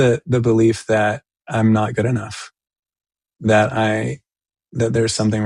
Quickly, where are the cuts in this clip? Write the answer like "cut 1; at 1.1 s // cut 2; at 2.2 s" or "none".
none